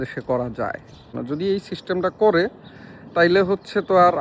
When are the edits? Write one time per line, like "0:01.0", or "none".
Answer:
0:01.1